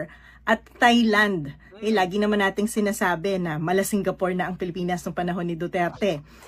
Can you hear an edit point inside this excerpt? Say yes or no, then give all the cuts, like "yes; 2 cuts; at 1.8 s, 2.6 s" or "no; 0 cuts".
no; 0 cuts